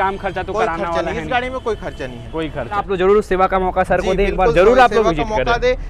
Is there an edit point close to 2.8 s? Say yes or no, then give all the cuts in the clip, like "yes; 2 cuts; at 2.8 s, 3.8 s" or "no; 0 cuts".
yes; 1 cut; at 2.8 s